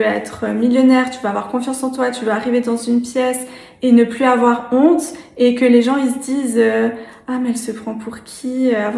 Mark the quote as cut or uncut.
uncut